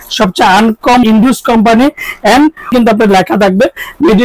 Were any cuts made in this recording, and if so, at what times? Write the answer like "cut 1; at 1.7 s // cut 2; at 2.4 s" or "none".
cut 1; at 1.0 s // cut 2; at 2.7 s